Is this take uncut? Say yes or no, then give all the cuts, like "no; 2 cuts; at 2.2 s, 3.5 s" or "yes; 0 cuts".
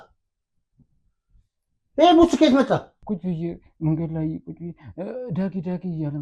no; 1 cut; at 2.9 s